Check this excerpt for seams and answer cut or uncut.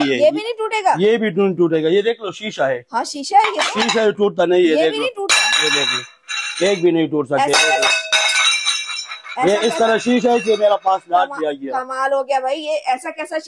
uncut